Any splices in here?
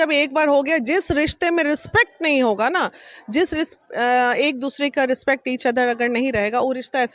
no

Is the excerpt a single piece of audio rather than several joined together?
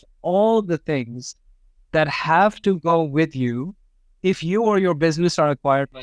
yes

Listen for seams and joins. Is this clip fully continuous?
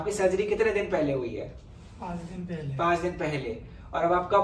yes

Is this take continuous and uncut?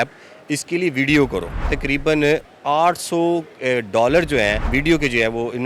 no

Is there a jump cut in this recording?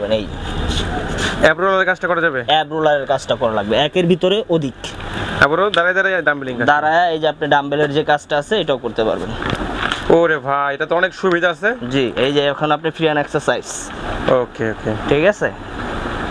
no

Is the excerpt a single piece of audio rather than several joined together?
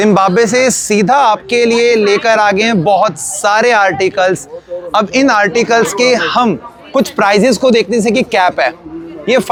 yes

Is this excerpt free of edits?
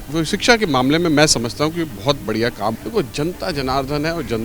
no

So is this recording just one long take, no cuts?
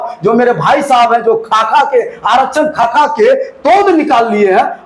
yes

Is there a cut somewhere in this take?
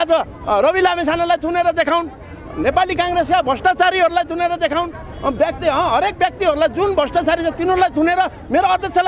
no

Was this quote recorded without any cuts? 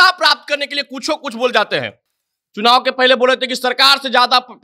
yes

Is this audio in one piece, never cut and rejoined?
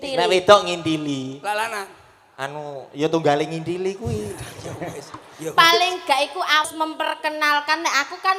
no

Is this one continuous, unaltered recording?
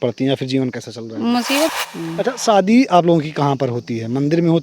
no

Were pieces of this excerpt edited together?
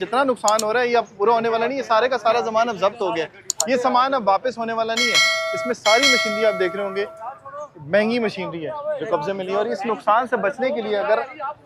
no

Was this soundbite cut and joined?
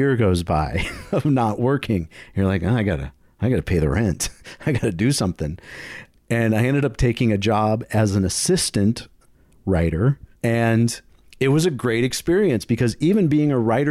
yes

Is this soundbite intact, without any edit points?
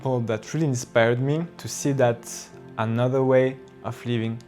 no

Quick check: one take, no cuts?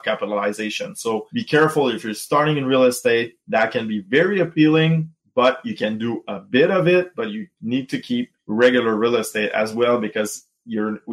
no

